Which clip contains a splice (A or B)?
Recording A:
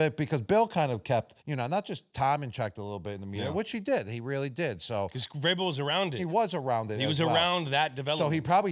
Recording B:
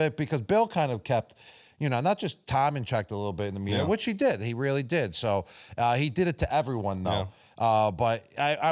A